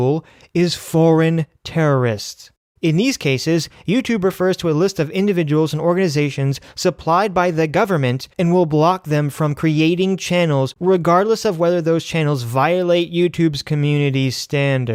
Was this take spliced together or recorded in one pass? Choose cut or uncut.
uncut